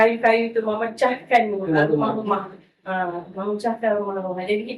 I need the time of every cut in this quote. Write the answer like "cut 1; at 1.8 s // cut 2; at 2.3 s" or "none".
none